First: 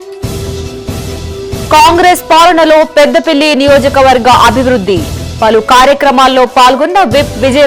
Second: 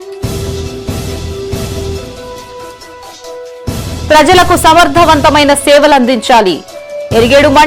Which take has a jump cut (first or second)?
first